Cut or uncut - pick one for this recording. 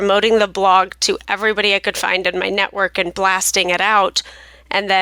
uncut